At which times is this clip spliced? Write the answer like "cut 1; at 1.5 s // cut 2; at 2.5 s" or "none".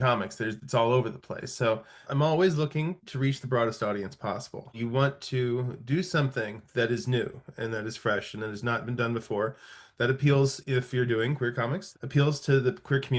cut 1; at 2.0 s // cut 2; at 4.8 s // cut 3; at 11.8 s